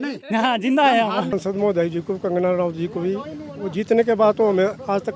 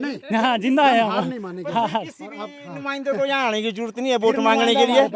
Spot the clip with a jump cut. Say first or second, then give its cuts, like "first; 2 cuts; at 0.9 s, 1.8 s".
first; 1 cut; at 1.3 s